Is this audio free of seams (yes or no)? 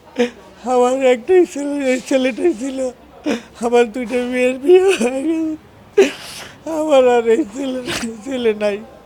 yes